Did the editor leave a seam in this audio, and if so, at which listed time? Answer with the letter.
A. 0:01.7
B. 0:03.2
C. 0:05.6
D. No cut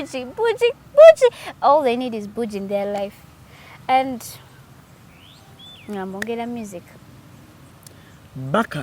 D